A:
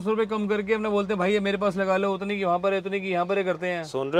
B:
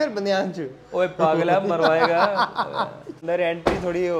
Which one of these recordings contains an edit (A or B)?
B